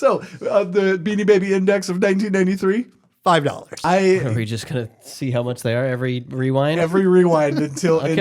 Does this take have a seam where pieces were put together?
yes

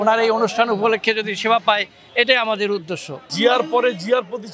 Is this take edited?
yes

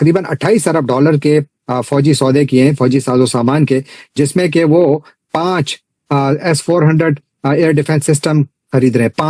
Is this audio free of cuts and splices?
yes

